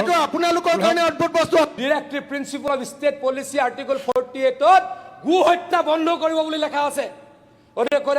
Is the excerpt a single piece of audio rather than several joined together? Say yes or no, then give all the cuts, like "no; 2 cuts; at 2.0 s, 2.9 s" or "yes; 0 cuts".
no; 1 cut; at 1.8 s